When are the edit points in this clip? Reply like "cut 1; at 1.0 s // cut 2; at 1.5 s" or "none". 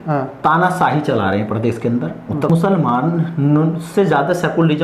cut 1; at 2.5 s